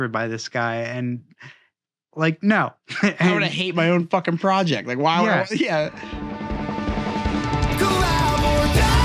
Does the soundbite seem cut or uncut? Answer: cut